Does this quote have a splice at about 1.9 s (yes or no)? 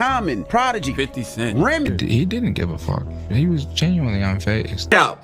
yes